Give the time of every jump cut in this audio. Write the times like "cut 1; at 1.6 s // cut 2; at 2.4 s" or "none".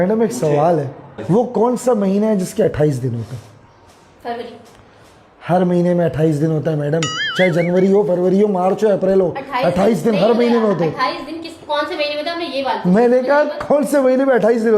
cut 1; at 1.2 s